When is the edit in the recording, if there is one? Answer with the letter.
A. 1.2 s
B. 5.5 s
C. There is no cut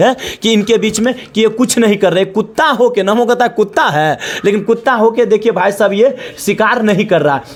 C